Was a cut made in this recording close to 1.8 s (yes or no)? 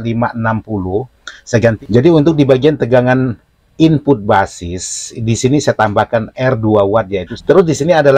yes